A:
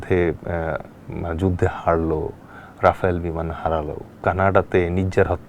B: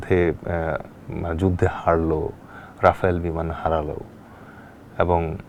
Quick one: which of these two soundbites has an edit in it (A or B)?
A